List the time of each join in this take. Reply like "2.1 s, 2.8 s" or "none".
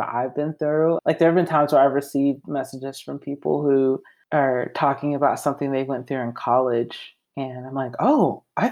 1.0 s, 4.1 s